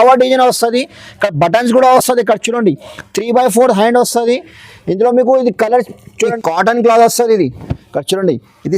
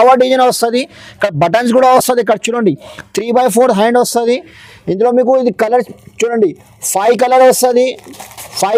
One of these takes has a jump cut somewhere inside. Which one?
first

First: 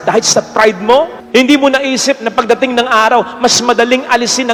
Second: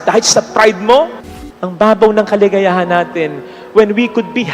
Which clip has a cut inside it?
second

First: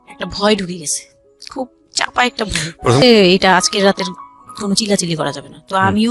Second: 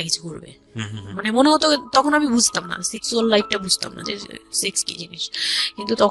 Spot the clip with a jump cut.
first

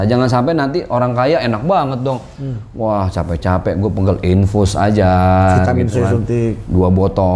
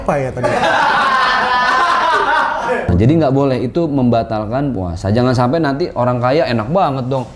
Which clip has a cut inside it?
second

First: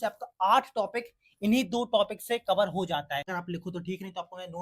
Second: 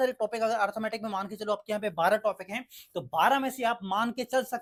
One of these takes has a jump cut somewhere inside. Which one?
first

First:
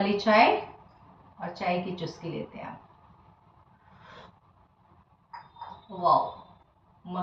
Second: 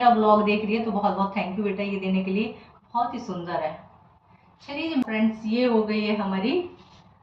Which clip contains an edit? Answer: second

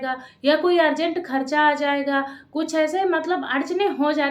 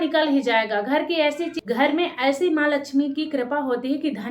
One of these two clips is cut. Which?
second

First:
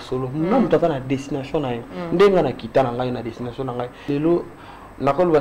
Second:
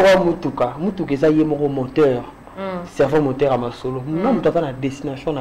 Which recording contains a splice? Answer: first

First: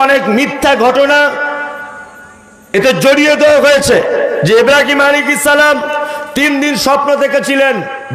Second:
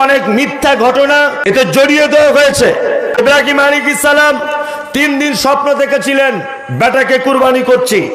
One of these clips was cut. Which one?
second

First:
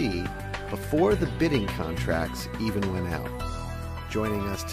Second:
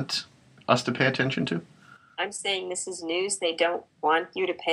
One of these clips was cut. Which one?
first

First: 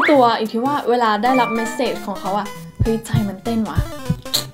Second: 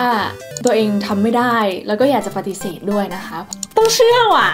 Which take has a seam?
second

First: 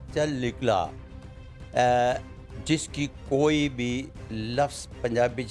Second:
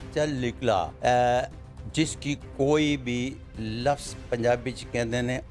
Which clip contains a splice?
second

